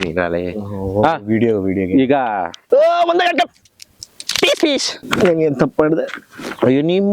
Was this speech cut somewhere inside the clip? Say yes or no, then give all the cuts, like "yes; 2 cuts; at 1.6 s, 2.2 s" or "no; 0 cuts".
yes; 2 cuts; at 2.5 s, 5.0 s